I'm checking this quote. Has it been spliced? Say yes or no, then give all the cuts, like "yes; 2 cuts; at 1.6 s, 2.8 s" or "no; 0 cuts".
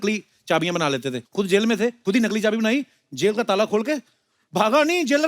yes; 2 cuts; at 1.2 s, 2.0 s